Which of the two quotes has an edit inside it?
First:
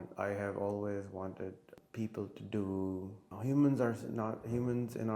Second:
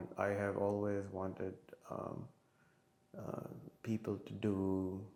first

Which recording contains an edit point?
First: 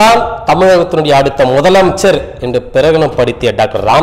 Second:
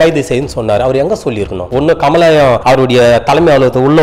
second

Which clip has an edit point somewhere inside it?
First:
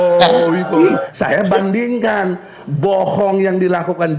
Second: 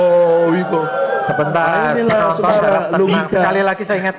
first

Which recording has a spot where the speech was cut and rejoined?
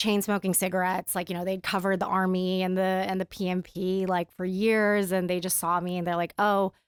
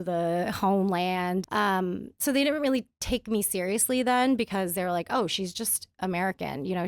second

